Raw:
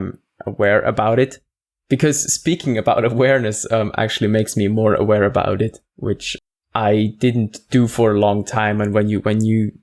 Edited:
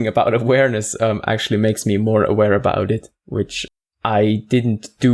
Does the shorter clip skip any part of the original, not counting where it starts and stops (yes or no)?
no